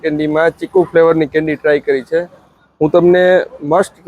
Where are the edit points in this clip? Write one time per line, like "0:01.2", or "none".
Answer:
none

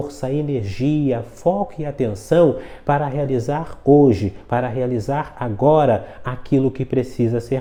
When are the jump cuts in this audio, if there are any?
none

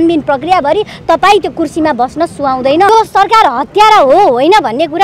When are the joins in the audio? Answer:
0:02.9

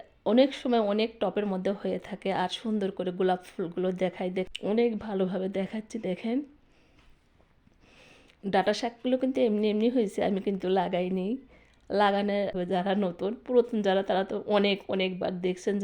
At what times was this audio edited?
0:04.5
0:12.6

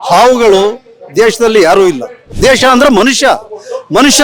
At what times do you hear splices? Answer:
0:02.2

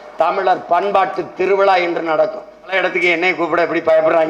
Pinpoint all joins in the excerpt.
0:02.7

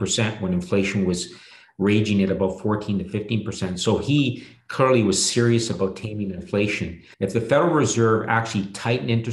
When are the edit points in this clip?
0:07.0

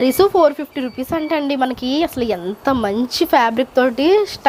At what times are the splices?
none

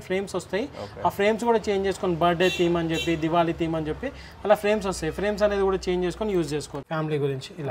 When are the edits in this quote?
0:06.8

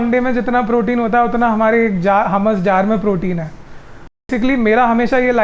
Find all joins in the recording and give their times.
0:04.2

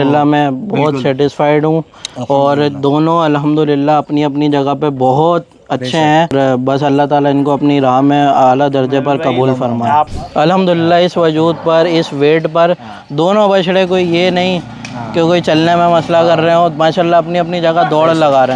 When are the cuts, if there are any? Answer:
0:06.3
0:10.2

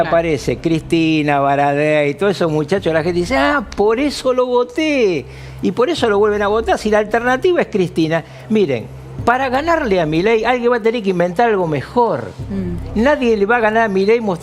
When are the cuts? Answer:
none

